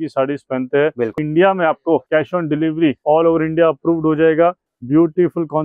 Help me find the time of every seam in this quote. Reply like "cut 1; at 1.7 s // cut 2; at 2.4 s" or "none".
cut 1; at 1.2 s // cut 2; at 2.0 s // cut 3; at 3.0 s // cut 4; at 4.7 s